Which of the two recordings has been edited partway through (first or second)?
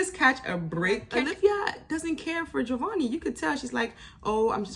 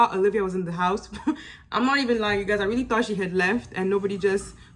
first